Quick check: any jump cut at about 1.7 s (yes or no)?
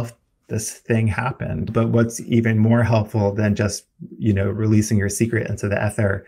yes